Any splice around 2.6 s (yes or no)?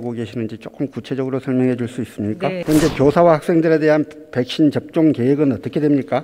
yes